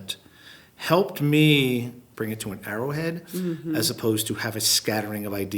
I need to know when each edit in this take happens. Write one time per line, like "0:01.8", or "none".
0:02.0